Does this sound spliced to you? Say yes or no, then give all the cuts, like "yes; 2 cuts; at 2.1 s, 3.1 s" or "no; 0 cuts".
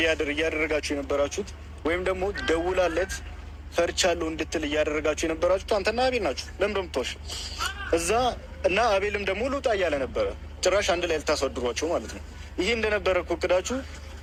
no; 0 cuts